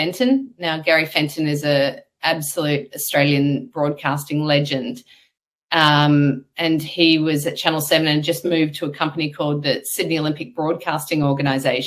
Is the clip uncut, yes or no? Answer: yes